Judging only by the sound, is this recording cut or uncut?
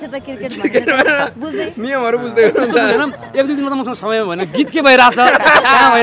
uncut